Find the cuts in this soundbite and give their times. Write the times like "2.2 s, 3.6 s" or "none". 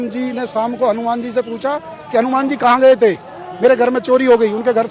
none